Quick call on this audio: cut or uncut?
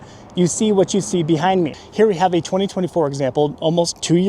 cut